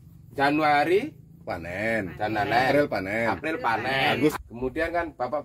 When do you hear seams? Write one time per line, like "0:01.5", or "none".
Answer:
0:04.3